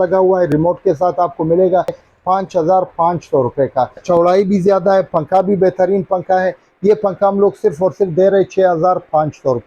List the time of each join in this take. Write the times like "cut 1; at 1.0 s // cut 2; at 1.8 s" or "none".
cut 1; at 2.0 s // cut 2; at 4.0 s